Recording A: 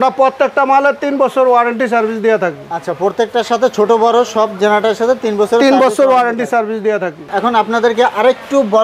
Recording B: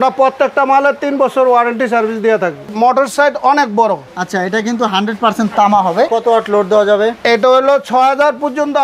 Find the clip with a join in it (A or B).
B